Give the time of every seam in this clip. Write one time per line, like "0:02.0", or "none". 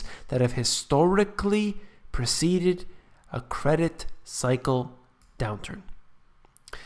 0:01.5